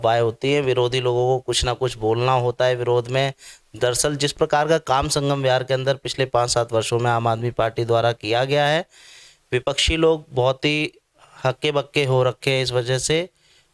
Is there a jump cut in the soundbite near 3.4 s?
no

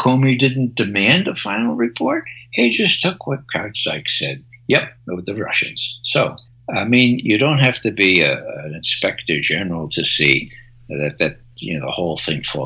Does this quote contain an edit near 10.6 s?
no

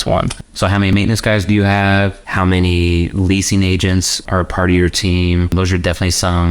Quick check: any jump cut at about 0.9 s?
yes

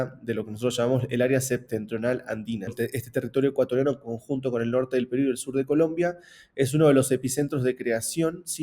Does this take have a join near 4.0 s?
no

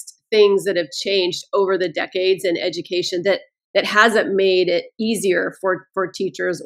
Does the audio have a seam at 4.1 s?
no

